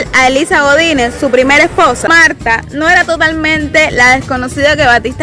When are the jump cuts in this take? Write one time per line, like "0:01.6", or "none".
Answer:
0:02.1